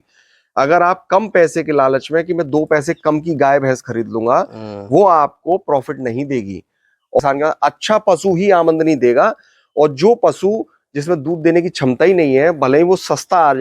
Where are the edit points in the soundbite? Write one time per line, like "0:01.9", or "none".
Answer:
0:07.2

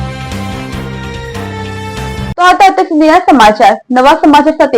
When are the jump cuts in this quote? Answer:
none

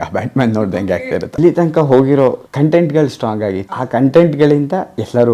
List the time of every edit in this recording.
0:01.4
0:02.4
0:03.7

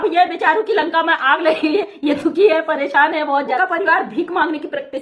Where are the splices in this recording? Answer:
0:03.6

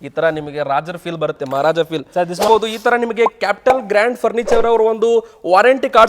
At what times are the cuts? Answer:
0:02.5

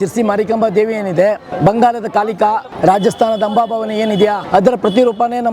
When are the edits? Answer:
0:01.5
0:02.7
0:04.4

